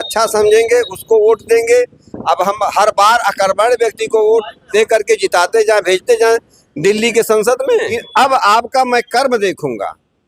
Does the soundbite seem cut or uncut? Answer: cut